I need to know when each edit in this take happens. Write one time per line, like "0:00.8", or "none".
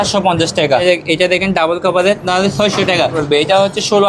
0:00.8
0:02.2
0:03.2

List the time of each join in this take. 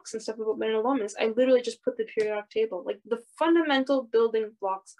none

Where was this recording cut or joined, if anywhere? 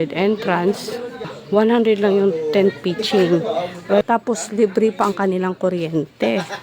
0:01.3
0:04.0

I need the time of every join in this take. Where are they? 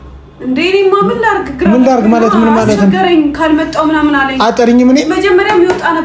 0:02.8

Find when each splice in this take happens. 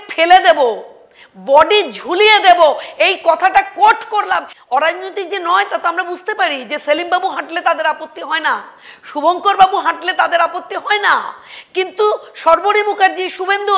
0:04.5

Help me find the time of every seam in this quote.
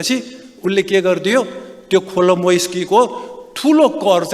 none

